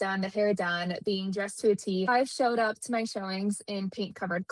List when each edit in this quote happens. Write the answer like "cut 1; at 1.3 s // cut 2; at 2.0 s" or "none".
cut 1; at 2.1 s